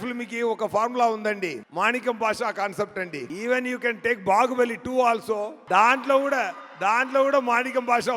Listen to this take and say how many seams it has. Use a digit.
3